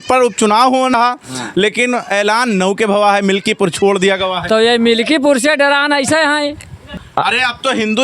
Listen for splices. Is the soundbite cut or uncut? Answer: cut